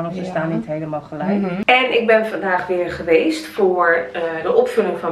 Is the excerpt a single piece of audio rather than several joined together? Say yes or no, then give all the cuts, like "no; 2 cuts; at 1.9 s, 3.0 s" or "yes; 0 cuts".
no; 1 cut; at 1.6 s